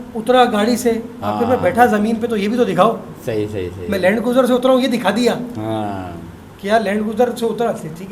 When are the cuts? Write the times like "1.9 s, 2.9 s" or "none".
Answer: none